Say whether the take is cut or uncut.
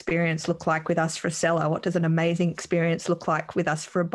uncut